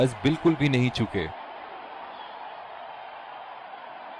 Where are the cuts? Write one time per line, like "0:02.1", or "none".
0:01.3
0:03.0